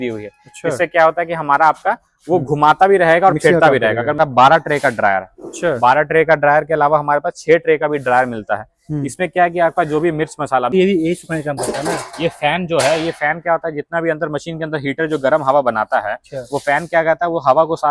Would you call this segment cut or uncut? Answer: cut